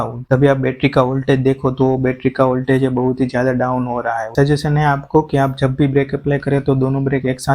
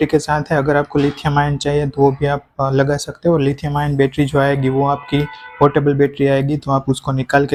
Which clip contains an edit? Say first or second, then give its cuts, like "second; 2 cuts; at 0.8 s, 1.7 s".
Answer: first; 1 cut; at 4.3 s